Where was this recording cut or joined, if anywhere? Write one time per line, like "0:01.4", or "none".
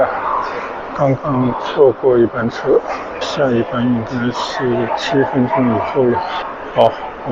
none